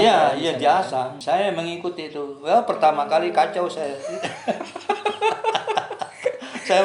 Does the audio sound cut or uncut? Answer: cut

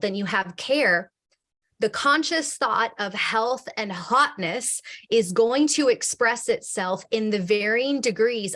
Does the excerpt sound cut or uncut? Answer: uncut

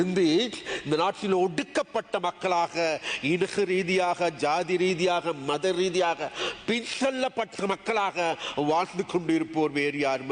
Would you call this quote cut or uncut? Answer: uncut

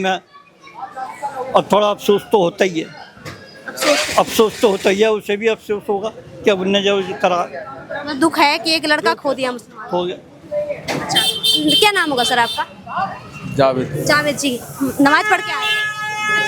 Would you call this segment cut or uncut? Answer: uncut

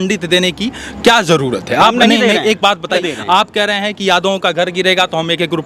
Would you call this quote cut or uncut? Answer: cut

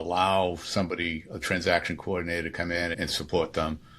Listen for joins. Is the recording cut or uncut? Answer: cut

